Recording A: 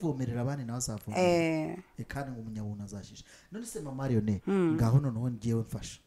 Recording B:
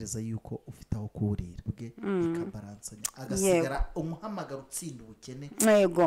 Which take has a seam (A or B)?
B